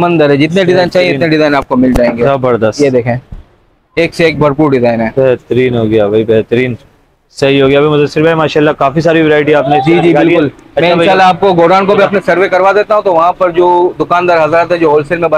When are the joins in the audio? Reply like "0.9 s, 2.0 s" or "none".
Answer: none